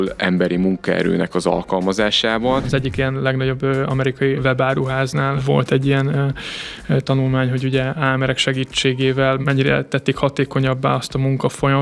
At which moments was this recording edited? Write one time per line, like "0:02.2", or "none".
0:02.7
0:04.4
0:05.4
0:08.0
0:09.4